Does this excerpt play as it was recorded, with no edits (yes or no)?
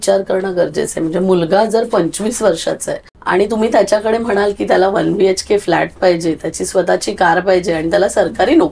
no